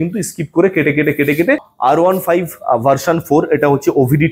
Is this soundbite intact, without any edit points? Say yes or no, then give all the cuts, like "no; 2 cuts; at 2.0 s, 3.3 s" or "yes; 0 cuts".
no; 1 cut; at 1.7 s